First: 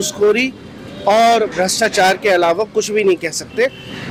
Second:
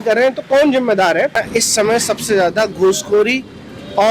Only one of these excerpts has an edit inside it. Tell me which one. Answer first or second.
second